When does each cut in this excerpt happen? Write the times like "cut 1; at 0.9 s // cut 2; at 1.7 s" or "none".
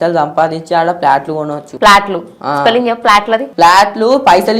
cut 1; at 1.6 s // cut 2; at 3.5 s